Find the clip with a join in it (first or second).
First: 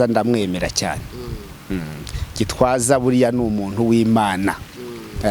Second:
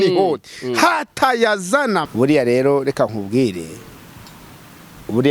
second